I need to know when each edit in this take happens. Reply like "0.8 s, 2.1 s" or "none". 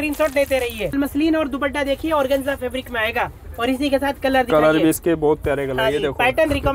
0.9 s